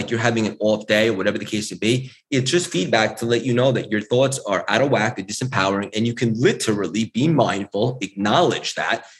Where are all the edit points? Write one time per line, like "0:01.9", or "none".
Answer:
none